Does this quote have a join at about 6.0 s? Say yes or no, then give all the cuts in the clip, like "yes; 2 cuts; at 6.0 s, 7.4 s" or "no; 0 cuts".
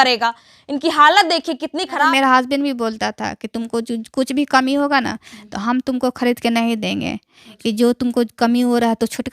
no; 1 cut; at 2.1 s